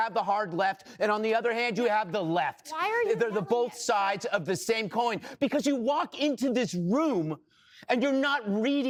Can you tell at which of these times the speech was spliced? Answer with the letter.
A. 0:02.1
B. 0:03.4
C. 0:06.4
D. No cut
D